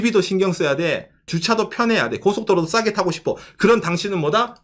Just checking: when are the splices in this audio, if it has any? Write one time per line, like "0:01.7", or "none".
0:01.3